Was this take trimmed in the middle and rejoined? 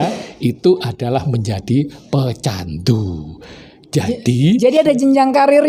no; 0 cuts

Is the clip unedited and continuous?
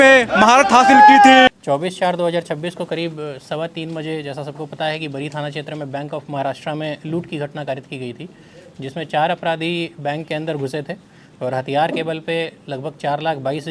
yes; 0 cuts

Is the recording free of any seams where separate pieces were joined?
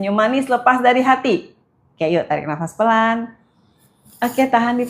no; 1 cut; at 0.9 s

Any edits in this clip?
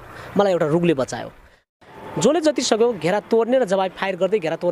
yes; 1 cut; at 1.6 s

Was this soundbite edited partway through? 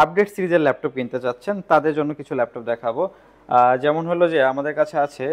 no; 0 cuts

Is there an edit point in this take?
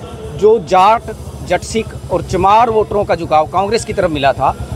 no; 0 cuts

